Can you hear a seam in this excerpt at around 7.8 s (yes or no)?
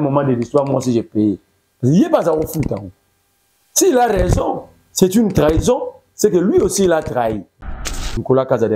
yes